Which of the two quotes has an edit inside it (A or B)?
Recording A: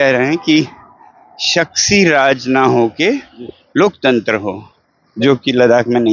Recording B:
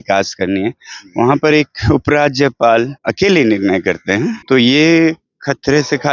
B